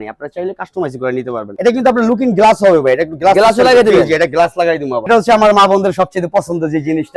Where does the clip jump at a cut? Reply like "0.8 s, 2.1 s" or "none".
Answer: 1.5 s, 5.1 s